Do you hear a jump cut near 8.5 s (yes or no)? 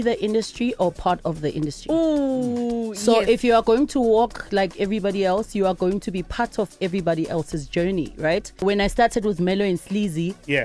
yes